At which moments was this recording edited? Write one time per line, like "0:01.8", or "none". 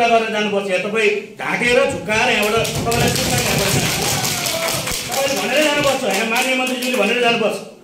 none